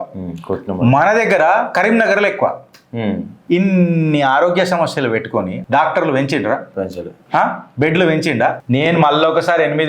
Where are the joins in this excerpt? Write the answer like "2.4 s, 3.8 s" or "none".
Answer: 3.3 s, 8.6 s